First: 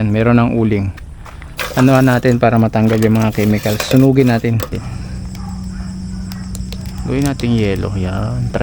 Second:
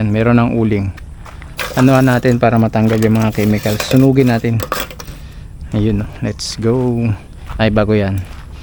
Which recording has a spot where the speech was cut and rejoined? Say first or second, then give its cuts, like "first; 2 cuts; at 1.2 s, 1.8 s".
first; 1 cut; at 4.7 s